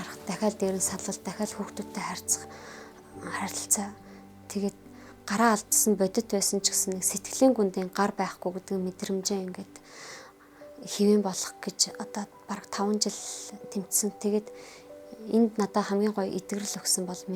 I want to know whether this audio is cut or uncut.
uncut